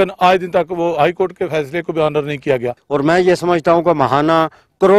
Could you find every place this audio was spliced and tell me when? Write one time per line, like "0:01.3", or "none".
0:02.8